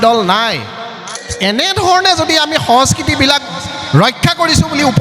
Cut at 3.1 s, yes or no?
no